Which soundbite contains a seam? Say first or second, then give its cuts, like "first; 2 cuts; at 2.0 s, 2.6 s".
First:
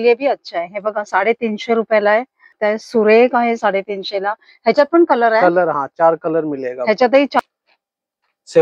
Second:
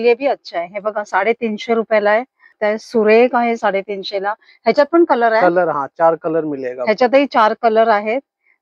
first; 1 cut; at 7.4 s